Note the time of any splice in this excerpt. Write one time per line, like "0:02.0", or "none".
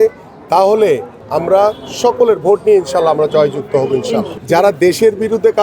0:01.2
0:04.3